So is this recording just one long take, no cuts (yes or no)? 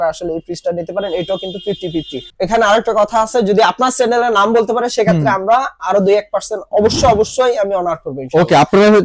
no